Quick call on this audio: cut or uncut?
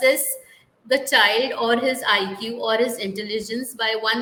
uncut